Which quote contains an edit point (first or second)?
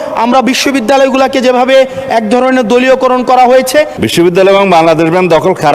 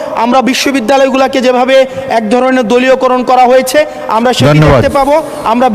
first